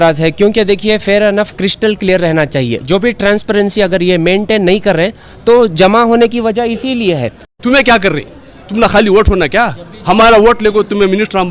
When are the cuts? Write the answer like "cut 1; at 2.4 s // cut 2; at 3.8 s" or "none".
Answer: cut 1; at 7.4 s